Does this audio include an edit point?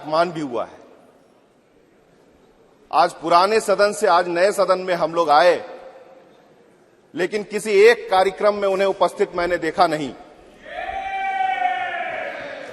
yes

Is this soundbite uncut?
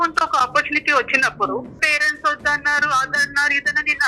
no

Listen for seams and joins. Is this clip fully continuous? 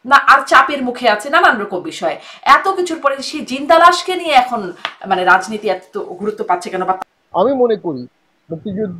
no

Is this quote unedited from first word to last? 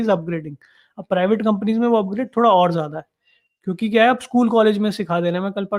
yes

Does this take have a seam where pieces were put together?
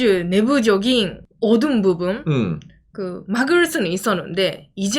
no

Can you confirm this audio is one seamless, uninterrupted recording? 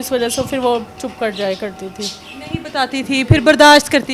yes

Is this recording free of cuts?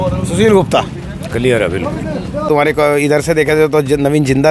no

